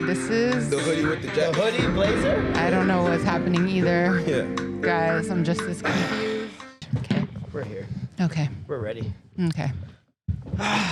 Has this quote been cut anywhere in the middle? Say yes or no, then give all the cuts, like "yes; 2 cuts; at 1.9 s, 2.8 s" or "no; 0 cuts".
yes; 1 cut; at 6.8 s